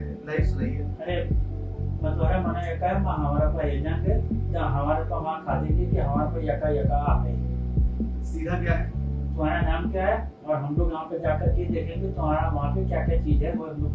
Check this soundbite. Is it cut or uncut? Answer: uncut